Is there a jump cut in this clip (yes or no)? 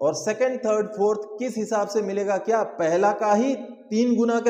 no